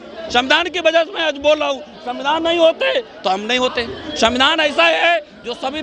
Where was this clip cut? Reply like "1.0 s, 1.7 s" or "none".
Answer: none